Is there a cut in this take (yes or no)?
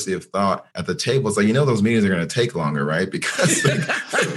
no